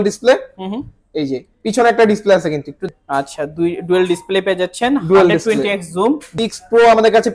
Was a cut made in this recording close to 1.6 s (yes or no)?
no